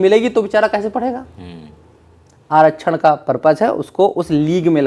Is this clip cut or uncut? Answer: uncut